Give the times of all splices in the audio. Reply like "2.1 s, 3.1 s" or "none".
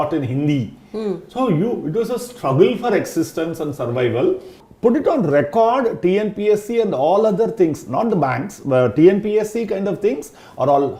4.6 s